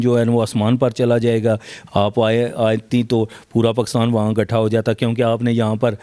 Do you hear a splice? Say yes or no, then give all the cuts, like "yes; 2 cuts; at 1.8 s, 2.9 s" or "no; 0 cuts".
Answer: yes; 1 cut; at 1.7 s